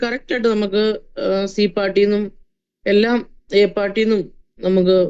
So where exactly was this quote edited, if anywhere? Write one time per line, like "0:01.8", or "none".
none